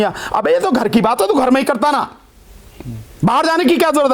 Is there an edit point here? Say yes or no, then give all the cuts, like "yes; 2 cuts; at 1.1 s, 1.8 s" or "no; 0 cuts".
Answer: no; 0 cuts